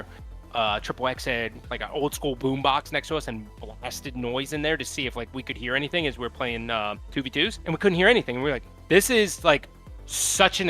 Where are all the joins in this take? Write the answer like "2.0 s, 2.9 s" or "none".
1.7 s, 7.6 s